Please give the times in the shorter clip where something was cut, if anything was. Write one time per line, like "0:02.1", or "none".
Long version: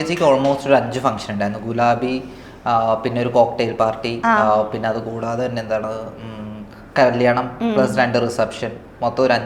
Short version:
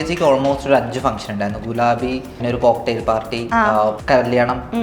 0:02.4
0:04.0